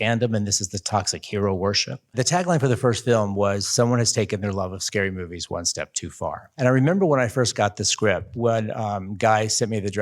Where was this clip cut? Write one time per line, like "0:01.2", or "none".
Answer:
0:02.1
0:06.5